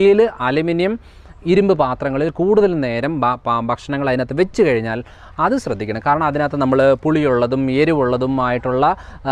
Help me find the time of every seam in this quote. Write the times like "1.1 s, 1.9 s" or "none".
none